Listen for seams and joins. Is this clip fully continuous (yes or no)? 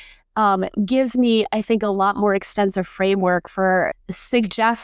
no